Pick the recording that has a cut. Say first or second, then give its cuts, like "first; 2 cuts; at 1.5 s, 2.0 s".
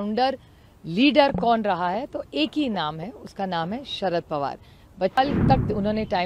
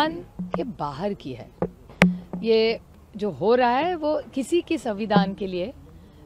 first; 1 cut; at 5.2 s